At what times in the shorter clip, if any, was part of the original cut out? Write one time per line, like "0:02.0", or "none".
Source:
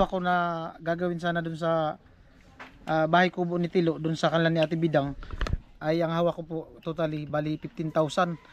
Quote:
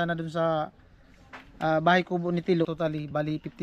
0:02.7